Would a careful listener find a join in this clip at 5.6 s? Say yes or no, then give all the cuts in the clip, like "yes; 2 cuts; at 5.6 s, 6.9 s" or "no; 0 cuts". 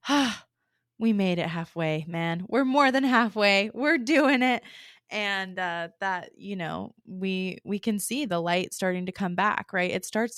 no; 0 cuts